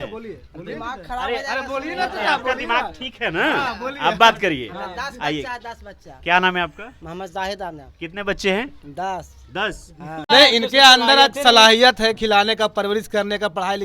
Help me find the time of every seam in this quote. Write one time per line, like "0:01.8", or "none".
0:10.3